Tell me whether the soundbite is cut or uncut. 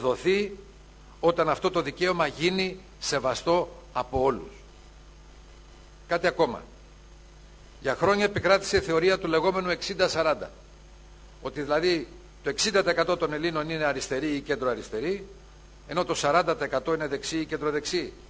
cut